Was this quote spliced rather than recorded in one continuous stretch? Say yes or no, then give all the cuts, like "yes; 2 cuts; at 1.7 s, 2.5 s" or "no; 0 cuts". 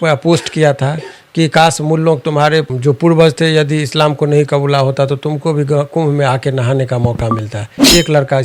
no; 0 cuts